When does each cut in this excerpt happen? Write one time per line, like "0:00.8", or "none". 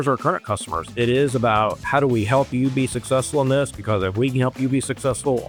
none